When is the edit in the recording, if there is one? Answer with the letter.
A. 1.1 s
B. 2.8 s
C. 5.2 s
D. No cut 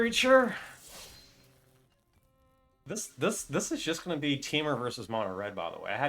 B